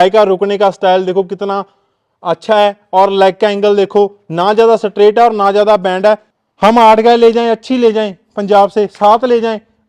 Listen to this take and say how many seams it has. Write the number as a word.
one